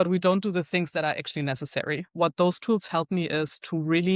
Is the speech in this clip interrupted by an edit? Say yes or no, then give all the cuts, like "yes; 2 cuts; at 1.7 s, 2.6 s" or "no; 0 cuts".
yes; 1 cut; at 2.1 s